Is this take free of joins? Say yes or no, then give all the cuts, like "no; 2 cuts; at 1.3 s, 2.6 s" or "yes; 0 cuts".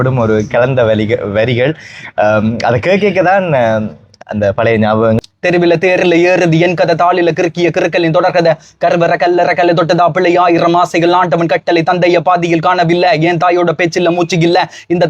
no; 1 cut; at 5.2 s